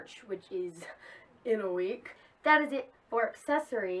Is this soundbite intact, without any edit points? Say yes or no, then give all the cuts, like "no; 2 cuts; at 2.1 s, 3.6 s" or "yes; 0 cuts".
yes; 0 cuts